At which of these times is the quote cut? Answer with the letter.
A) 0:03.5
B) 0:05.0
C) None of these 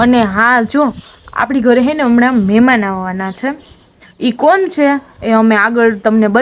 C